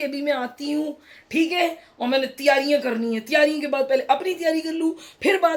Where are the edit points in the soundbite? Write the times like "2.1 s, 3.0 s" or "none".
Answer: none